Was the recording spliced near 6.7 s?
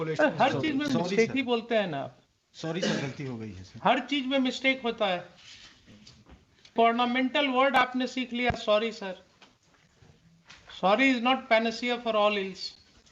yes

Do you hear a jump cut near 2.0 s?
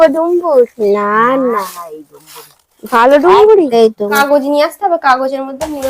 no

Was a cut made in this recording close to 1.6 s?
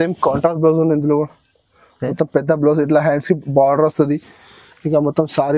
no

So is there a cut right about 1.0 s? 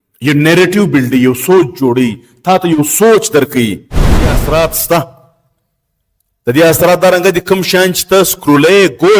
no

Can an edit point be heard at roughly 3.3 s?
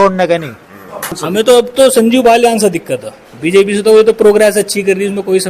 no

